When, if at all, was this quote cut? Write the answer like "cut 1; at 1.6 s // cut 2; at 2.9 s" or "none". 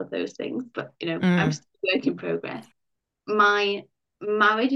cut 1; at 2.7 s